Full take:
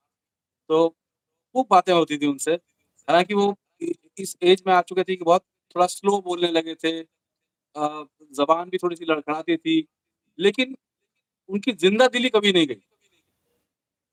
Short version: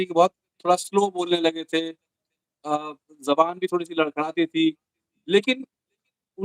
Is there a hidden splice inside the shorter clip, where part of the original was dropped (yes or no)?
no